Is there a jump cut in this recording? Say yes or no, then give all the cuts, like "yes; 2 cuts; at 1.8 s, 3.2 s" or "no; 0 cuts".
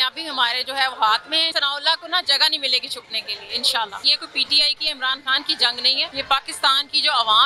yes; 3 cuts; at 1.5 s, 4.2 s, 6.1 s